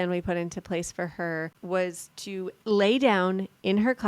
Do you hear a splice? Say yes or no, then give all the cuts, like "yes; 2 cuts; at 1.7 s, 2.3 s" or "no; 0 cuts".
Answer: yes; 2 cuts; at 1.6 s, 2.6 s